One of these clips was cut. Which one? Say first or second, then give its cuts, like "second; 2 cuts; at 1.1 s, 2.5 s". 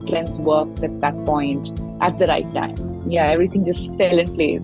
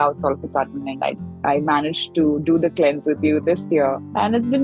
second; 1 cut; at 1.3 s